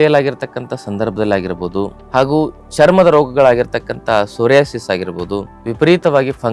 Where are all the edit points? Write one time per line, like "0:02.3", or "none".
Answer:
0:02.0
0:05.6